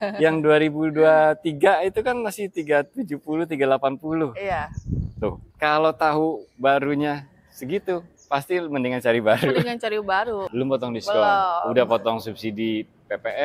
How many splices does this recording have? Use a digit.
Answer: 2